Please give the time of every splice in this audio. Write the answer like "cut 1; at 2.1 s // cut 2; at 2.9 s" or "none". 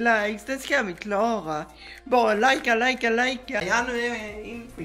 cut 1; at 3.6 s